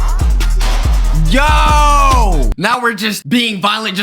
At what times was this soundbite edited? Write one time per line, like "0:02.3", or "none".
0:02.5

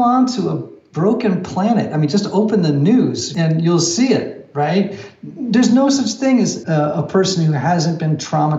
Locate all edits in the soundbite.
0:03.3
0:06.6

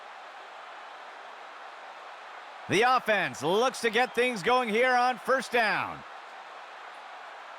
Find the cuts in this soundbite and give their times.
0:01.0
0:02.7
0:06.0

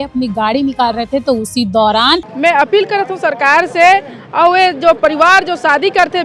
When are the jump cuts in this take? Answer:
0:02.3

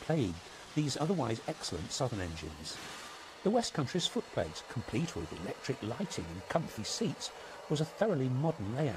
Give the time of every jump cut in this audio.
0:05.9

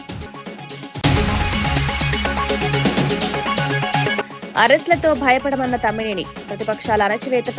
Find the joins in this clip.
0:01.0
0:04.1

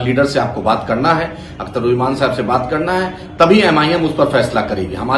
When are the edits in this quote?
none

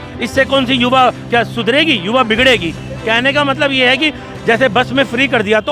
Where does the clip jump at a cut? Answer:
none

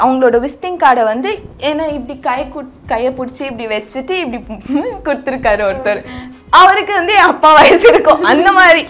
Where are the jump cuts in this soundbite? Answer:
none

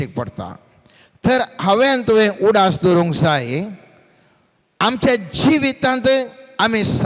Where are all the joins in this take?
none

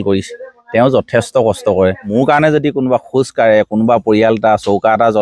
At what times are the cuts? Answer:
0:02.1

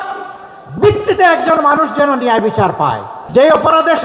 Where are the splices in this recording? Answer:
0:03.1

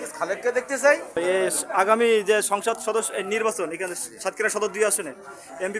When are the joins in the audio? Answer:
0:01.2

